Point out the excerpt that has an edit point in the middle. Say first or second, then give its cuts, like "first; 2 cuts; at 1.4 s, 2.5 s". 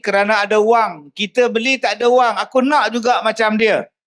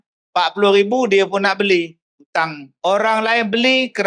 second; 1 cut; at 2.6 s